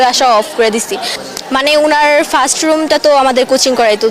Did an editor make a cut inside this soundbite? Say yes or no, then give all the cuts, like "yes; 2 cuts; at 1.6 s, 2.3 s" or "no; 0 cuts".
yes; 1 cut; at 1.2 s